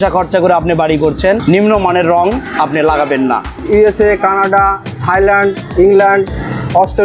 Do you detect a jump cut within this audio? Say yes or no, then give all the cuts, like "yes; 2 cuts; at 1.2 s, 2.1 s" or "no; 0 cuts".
yes; 2 cuts; at 1.4 s, 3.5 s